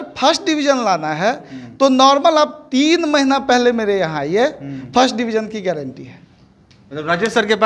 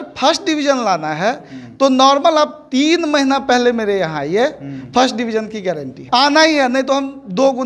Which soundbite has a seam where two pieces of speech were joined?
second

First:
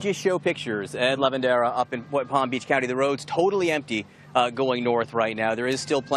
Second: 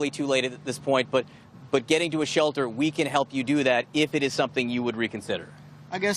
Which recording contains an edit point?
first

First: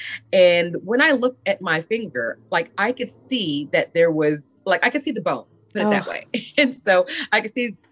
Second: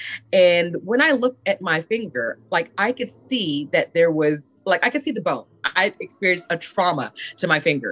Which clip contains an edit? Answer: second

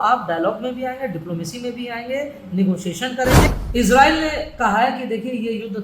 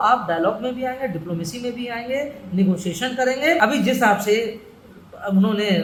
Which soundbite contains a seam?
first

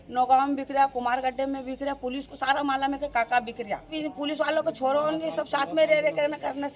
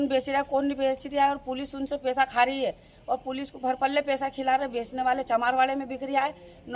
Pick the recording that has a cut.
first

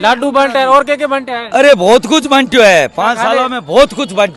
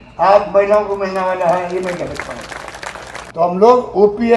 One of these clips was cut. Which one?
second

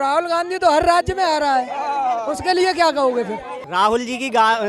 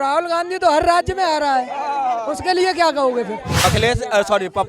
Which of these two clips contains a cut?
second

